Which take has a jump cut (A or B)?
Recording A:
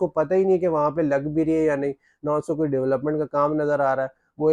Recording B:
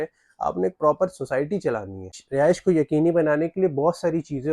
B